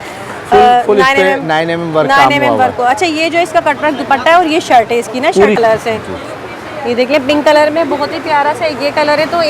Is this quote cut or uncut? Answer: cut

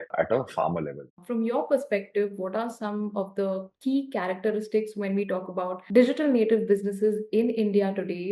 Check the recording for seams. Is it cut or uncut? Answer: cut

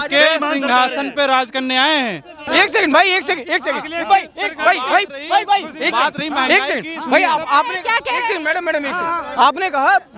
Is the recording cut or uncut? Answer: cut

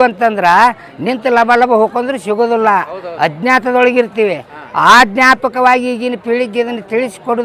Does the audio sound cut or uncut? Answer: uncut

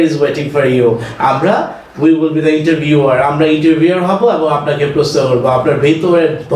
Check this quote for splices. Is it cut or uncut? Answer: uncut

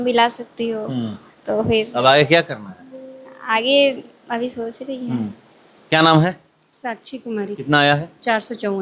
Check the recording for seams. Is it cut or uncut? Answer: uncut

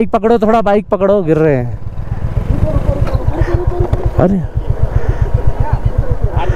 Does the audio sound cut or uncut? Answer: uncut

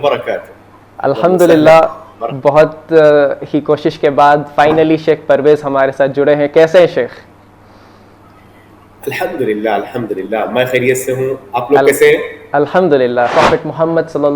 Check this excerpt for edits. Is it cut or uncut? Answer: cut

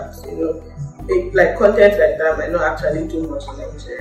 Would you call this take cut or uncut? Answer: uncut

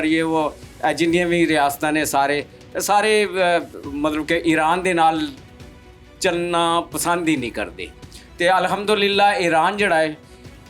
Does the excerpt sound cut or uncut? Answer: uncut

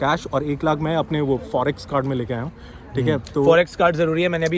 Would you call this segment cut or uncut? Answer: uncut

